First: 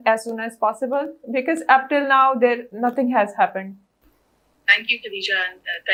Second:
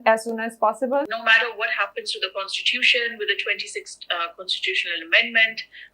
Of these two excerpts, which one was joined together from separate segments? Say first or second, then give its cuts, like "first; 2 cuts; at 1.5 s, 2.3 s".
second; 1 cut; at 1.1 s